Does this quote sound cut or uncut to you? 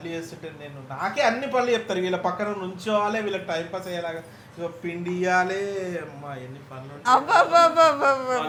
uncut